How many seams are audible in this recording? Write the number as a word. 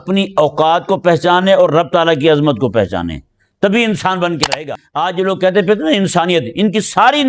one